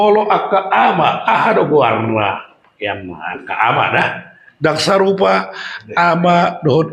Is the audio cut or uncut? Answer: uncut